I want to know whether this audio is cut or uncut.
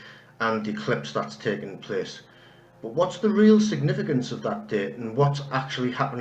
cut